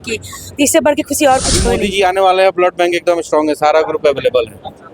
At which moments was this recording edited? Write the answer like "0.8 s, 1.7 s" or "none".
1.7 s